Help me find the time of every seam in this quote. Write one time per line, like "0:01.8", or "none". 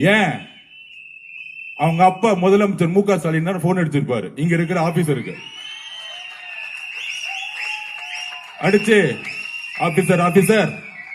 none

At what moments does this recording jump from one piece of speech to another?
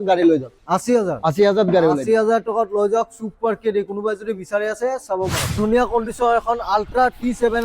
0:05.5

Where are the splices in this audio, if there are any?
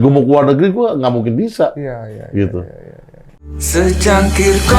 0:03.7

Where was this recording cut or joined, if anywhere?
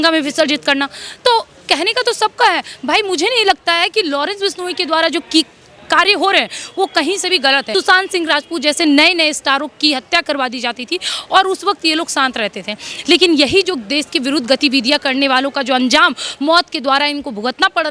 0:07.7

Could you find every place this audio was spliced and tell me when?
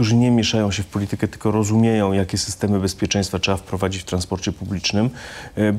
none

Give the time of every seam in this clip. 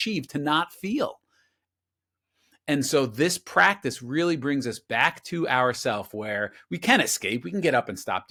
none

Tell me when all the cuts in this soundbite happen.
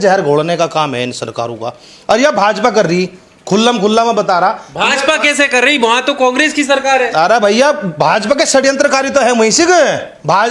none

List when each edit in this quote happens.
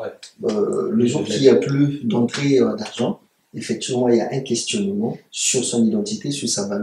none

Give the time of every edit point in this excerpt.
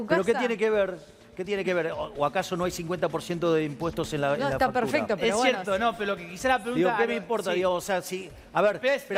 none

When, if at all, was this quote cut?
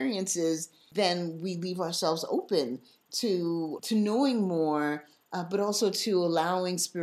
0:00.8
0:03.8

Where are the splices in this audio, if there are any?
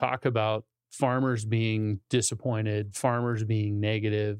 none

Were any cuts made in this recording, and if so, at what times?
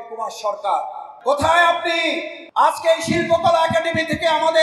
0:01.1
0:02.3

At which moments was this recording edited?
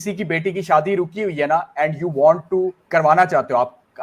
0:02.8

